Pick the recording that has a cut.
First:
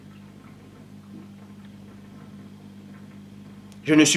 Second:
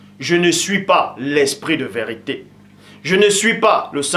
first; 1 cut; at 1.6 s

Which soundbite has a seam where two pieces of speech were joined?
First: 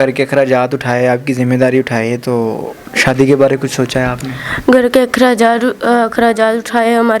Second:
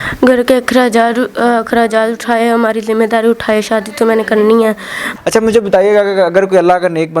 second; 1 cut; at 5.0 s

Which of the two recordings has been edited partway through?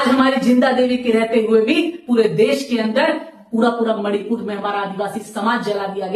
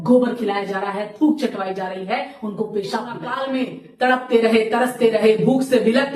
second; 1 cut; at 3.3 s

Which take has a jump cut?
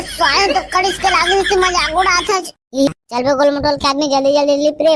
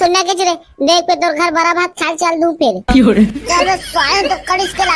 first; 1 cut; at 2.9 s

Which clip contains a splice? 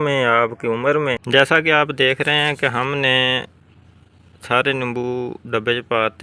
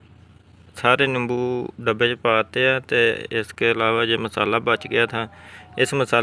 first; 1 cut; at 1.2 s

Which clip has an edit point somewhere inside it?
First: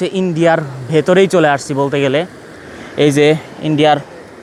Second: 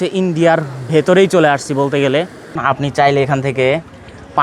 second; 1 cut; at 2.6 s

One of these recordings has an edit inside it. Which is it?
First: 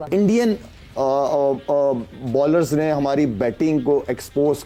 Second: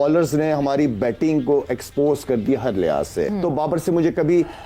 second; 1 cut; at 3.3 s

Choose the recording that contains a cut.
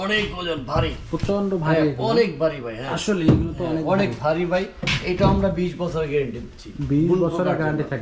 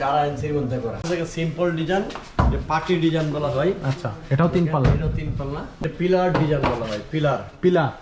second; 2 cuts; at 1.0 s, 5.8 s

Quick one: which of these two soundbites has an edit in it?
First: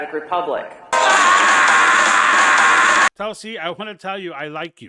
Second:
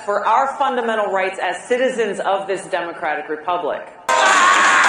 first; 1 cut; at 3.1 s

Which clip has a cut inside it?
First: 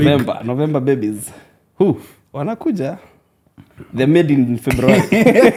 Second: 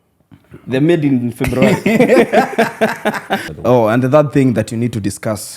second; 1 cut; at 3.5 s

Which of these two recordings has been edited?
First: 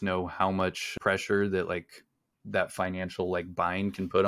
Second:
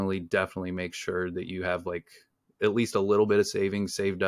first; 1 cut; at 0.9 s

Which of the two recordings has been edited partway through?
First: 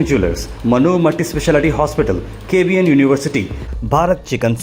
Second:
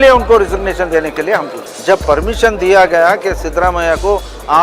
second; 1 cut; at 1.6 s

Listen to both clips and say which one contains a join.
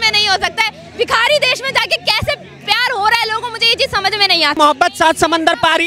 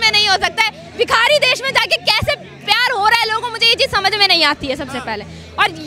first; 1 cut; at 4.6 s

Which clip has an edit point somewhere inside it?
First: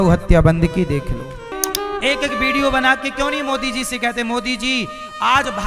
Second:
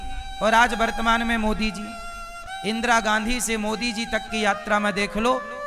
first; 1 cut; at 1.5 s

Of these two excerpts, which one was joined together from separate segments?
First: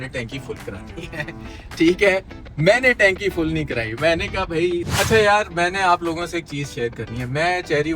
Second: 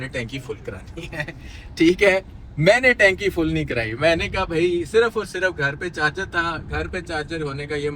first; 1 cut; at 4.9 s

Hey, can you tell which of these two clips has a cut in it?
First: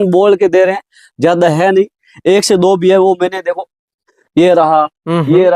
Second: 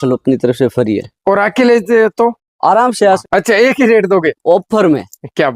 second; 1 cut; at 3.2 s

